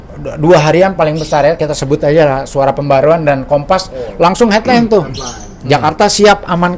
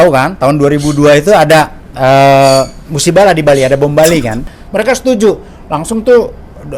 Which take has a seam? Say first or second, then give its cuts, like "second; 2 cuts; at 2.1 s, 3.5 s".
second; 1 cut; at 4.5 s